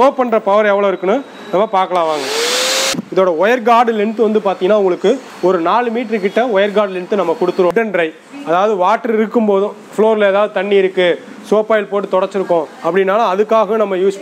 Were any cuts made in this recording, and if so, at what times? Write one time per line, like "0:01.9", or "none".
0:02.9
0:07.7